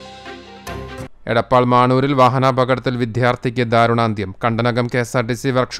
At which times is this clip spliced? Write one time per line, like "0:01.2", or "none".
0:01.0